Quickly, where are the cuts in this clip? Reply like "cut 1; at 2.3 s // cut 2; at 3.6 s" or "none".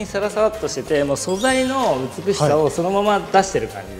none